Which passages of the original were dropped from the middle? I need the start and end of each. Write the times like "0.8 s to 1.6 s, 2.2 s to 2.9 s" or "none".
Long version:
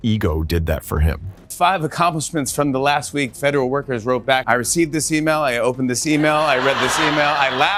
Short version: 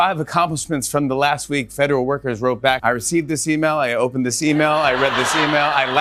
none